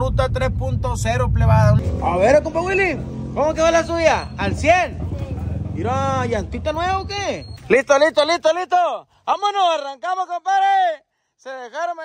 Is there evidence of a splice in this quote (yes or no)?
yes